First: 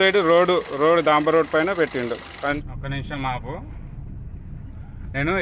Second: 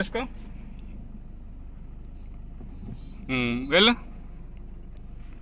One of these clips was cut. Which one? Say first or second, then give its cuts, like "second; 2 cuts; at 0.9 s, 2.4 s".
first; 1 cut; at 2.3 s